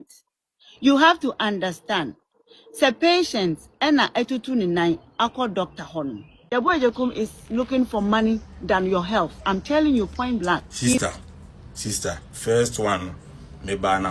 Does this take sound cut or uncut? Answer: cut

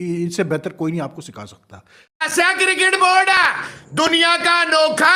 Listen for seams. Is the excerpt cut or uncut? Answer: cut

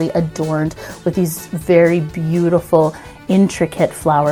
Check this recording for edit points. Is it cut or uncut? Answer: uncut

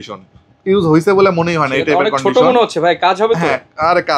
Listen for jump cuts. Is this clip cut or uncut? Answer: uncut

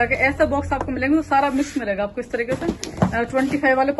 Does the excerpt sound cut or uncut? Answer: uncut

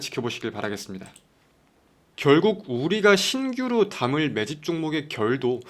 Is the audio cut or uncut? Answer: cut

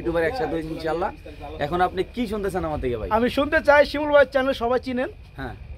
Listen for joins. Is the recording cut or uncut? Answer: uncut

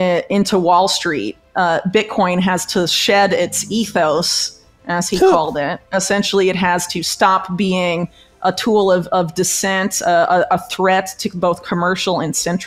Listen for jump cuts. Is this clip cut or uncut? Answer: uncut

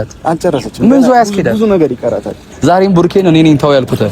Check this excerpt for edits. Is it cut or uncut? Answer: cut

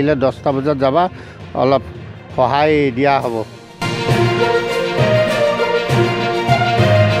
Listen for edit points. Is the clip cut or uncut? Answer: uncut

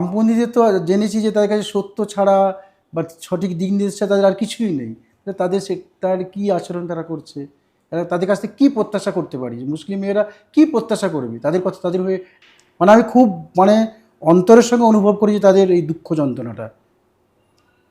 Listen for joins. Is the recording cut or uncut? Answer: cut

